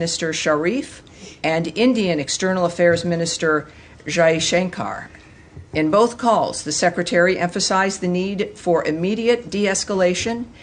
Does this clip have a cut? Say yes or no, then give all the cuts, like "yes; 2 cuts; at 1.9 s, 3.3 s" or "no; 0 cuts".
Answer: no; 0 cuts